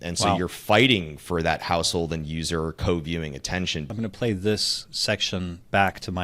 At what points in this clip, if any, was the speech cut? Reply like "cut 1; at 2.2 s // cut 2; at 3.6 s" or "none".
cut 1; at 3.9 s

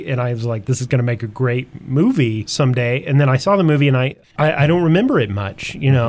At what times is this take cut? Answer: cut 1; at 2.4 s // cut 2; at 4.2 s

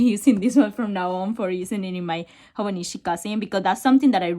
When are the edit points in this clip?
none

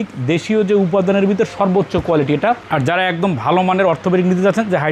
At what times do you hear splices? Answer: none

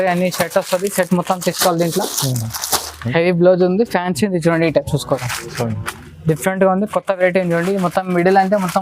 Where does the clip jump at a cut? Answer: cut 1; at 3.0 s

